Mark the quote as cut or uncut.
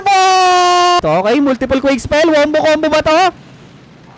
cut